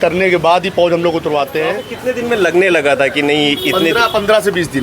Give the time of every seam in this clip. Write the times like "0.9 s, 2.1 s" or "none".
1.9 s